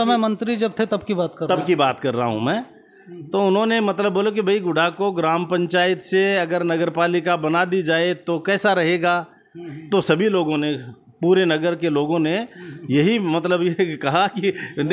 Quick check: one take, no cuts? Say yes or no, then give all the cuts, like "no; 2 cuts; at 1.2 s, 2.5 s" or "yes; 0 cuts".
yes; 0 cuts